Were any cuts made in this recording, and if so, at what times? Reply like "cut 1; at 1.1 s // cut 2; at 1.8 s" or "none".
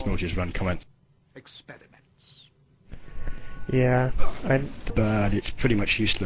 none